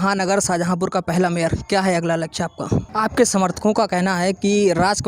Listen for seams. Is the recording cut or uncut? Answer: cut